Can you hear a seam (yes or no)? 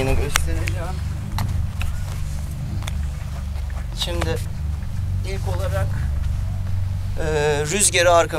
no